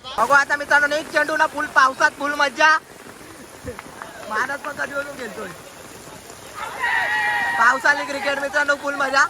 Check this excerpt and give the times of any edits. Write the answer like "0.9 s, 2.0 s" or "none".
3.2 s